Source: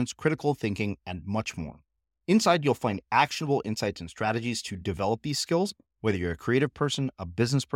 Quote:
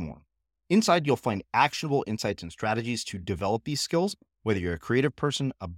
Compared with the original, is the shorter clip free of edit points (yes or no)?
yes